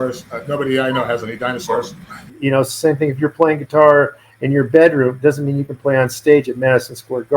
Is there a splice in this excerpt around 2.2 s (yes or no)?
yes